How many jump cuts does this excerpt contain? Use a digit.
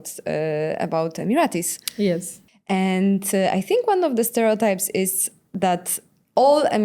1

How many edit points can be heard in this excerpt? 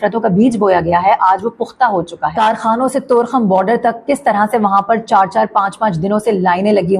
1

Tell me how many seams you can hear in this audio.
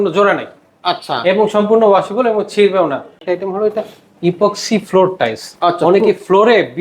1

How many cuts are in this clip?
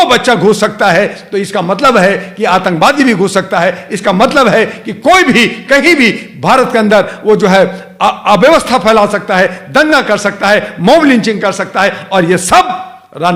0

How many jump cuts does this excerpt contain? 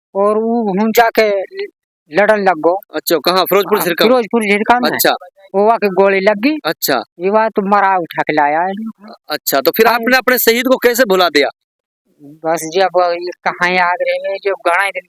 0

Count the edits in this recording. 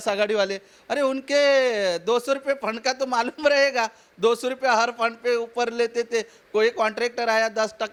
0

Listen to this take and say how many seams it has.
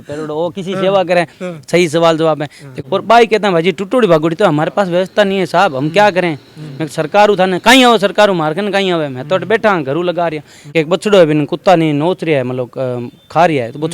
2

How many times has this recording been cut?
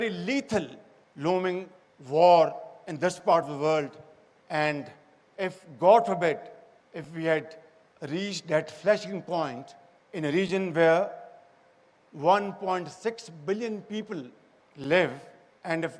1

